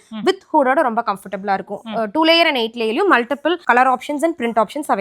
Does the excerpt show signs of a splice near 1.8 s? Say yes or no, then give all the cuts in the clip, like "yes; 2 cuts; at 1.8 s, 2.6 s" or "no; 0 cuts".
no; 0 cuts